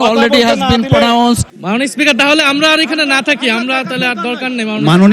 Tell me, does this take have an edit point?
yes; 1 cut; at 1.5 s

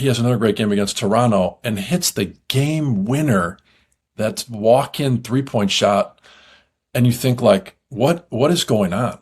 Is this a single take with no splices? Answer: yes; 0 cuts

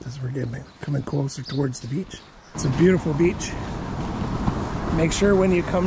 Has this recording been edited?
yes; 1 cut; at 2.5 s

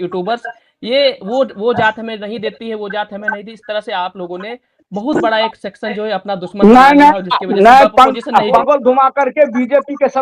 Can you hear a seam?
yes; 1 cut; at 8.6 s

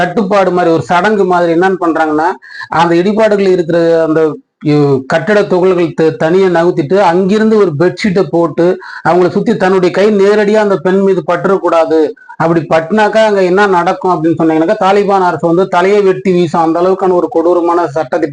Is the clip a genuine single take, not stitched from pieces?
yes; 0 cuts

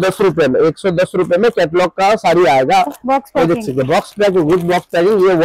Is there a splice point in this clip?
no; 0 cuts

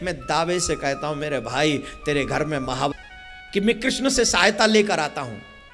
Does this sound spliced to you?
yes; 1 cut; at 2.9 s

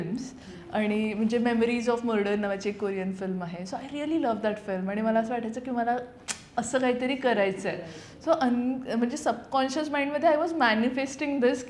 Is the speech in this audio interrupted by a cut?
no; 0 cuts

